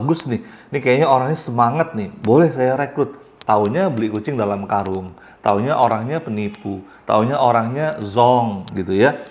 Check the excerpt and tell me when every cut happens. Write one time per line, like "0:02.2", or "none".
none

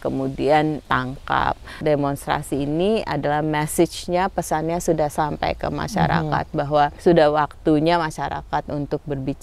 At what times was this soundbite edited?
0:01.6
0:07.0

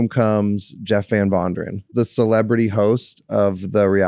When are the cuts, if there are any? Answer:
0:01.9

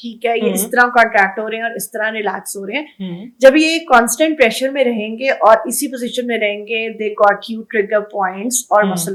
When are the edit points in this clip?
none

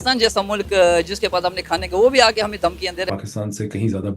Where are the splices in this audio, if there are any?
0:03.1

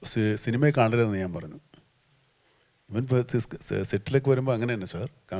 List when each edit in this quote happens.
none

